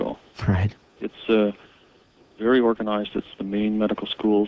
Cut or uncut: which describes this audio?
cut